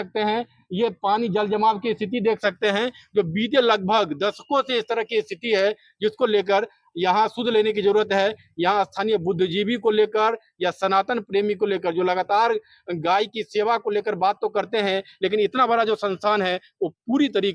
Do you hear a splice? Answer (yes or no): no